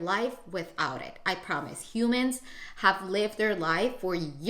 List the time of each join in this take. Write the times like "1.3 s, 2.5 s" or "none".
none